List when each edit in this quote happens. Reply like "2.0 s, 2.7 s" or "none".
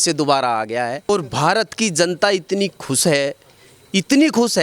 1.1 s